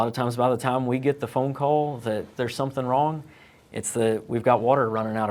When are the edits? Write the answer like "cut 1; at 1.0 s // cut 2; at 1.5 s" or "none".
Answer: none